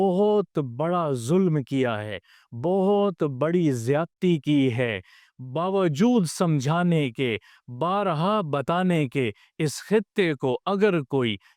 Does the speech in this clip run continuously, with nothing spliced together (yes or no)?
yes